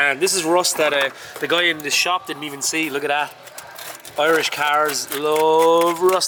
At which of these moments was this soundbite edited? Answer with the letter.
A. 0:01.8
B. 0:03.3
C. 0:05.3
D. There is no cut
D